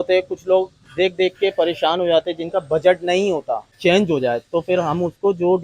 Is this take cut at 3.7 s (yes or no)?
yes